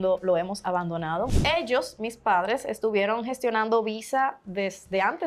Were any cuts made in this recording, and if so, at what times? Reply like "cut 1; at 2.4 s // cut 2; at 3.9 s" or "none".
cut 1; at 1.3 s